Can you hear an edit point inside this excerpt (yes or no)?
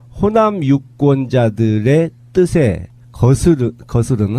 no